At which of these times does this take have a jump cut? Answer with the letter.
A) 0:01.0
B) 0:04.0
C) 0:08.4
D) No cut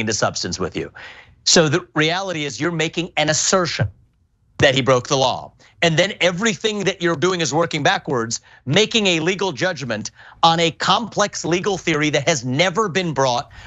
A